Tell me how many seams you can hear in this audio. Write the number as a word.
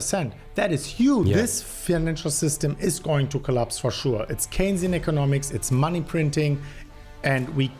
one